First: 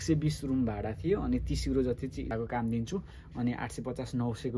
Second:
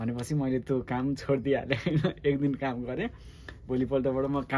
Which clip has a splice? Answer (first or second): first